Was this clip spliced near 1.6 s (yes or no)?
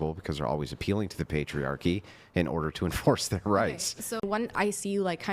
no